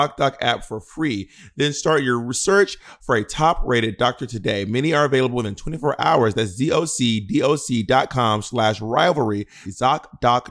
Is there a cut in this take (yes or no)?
yes